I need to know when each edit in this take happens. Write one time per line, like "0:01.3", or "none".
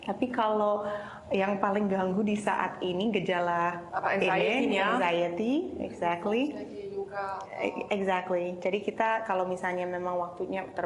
0:03.8